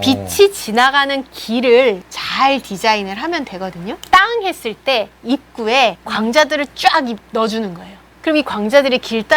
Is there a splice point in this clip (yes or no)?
yes